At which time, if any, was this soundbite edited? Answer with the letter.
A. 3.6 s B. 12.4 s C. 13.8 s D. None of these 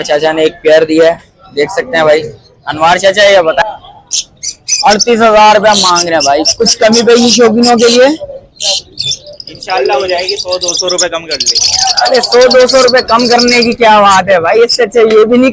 A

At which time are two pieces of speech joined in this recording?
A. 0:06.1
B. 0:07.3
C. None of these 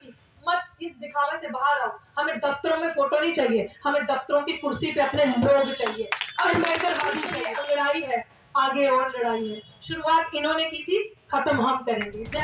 B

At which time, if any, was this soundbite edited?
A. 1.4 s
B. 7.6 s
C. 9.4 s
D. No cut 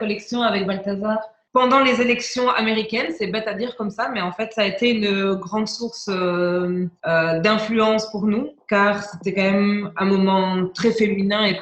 A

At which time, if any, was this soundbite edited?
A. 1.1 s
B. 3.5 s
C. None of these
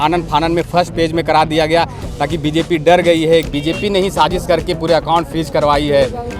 B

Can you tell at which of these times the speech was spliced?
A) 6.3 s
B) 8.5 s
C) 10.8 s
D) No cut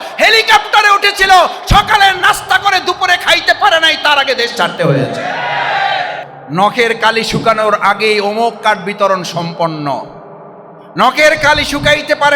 A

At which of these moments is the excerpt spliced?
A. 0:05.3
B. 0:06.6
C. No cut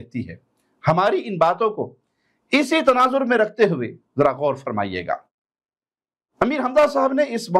C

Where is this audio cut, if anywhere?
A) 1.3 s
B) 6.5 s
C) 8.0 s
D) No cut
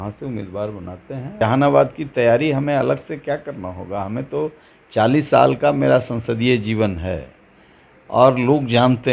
A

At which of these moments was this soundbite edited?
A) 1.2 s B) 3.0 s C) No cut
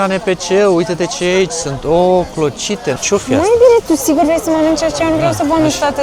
B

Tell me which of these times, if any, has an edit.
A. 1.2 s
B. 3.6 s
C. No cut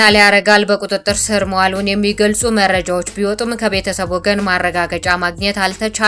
C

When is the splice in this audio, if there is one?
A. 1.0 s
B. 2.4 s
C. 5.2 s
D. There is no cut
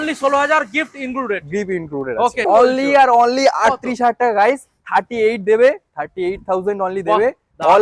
B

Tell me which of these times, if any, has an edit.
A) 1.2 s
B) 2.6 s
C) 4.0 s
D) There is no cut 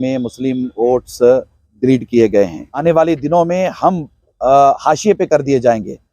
B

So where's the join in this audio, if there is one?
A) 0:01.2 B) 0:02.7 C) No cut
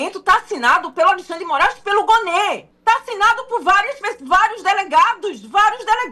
B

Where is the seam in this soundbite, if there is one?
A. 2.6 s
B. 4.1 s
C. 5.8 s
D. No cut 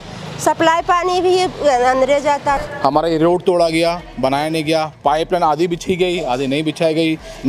A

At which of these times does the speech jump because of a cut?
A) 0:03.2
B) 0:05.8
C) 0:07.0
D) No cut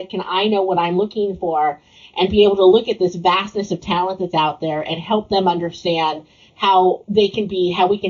C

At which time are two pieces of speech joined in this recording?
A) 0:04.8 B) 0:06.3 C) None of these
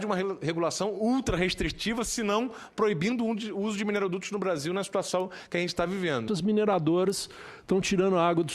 B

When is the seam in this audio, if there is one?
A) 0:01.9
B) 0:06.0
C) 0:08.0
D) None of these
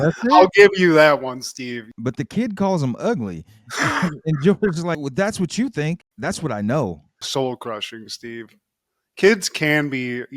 A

